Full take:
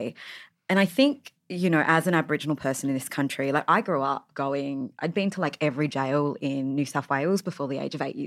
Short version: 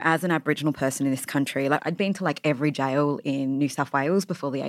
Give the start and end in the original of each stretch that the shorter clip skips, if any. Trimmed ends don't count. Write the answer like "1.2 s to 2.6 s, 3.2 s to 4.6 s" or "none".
3.6 s to 5.0 s